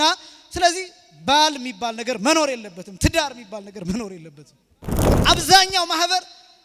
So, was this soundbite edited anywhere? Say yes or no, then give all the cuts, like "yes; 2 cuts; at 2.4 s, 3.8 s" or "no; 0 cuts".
yes; 1 cut; at 5.1 s